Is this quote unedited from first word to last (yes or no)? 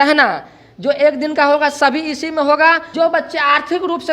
no